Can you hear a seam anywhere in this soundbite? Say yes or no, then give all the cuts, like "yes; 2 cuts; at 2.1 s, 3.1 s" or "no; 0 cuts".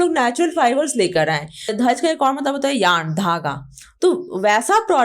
yes; 1 cut; at 1.7 s